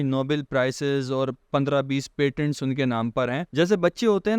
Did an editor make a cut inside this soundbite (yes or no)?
yes